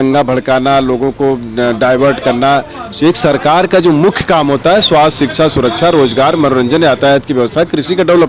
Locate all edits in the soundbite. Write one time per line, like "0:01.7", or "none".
none